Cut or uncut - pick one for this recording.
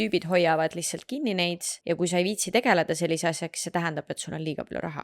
cut